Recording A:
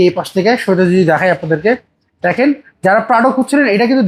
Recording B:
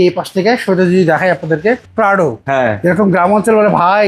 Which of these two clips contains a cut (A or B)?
B